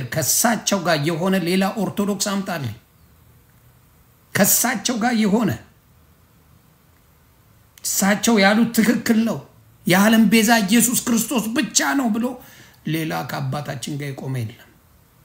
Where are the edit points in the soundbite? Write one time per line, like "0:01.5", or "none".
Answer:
none